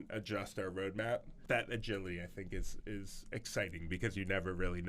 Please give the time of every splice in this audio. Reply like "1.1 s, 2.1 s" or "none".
1.3 s